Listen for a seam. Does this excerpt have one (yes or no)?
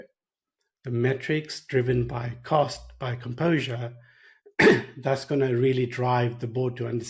no